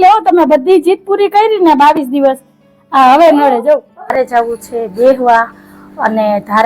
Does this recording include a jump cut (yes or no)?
yes